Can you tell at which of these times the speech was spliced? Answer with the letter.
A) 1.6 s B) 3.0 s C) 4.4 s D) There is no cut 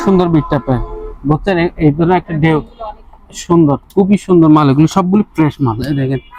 D